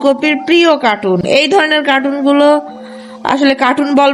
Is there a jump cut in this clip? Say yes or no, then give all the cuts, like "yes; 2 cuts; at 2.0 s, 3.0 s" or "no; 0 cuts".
no; 0 cuts